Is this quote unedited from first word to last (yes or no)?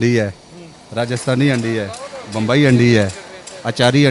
yes